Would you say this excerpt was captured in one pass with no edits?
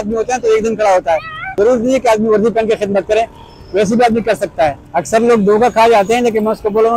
no; 2 cuts; at 1.4 s, 4.8 s

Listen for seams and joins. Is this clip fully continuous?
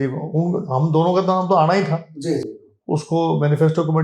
yes; 0 cuts

